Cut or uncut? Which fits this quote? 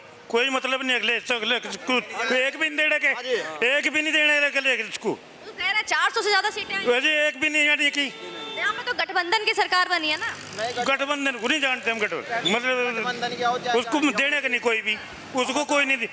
uncut